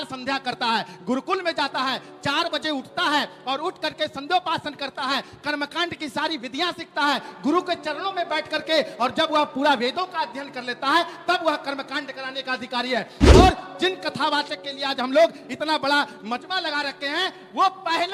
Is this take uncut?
yes; 0 cuts

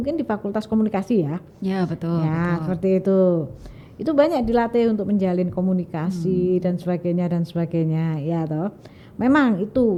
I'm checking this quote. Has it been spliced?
no; 0 cuts

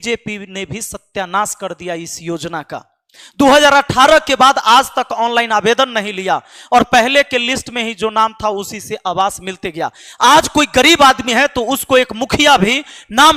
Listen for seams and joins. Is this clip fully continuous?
yes; 0 cuts

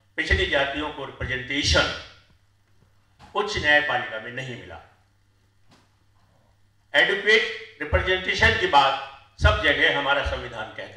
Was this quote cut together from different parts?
no; 0 cuts

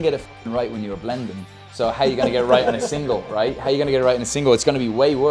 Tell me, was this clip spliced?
no; 0 cuts

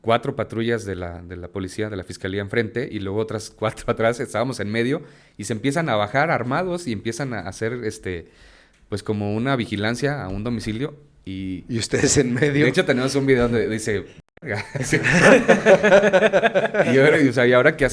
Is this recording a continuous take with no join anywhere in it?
yes; 0 cuts

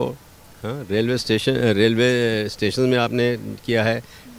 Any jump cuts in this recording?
no; 0 cuts

